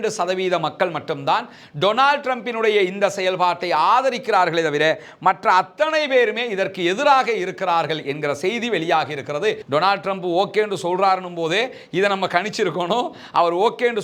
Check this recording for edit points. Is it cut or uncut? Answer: cut